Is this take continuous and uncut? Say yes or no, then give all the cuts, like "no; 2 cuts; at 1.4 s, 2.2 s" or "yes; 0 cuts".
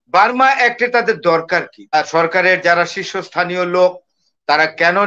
no; 1 cut; at 1.9 s